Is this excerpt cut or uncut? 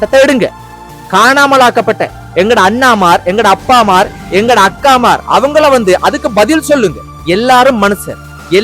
cut